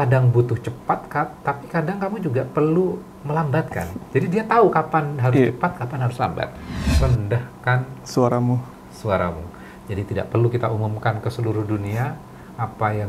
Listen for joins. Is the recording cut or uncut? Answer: cut